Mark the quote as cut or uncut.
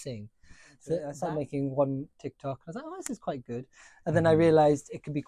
cut